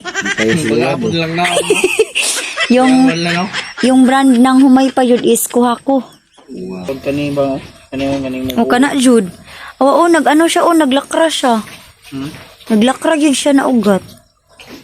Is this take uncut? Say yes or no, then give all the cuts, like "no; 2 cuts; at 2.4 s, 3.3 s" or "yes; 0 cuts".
no; 1 cut; at 6.8 s